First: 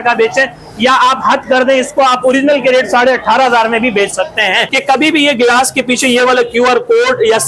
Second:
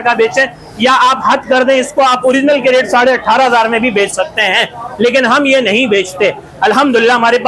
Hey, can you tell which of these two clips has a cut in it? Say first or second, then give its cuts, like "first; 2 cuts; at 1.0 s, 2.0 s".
first; 1 cut; at 4.7 s